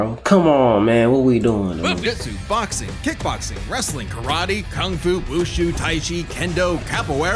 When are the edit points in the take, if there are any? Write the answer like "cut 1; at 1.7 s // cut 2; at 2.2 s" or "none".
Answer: cut 1; at 2.0 s